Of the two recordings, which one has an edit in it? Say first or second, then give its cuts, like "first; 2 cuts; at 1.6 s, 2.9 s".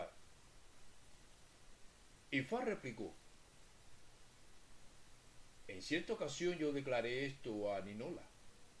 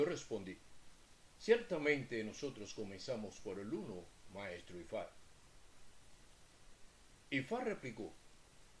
first; 1 cut; at 5.1 s